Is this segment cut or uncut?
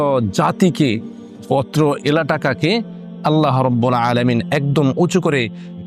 uncut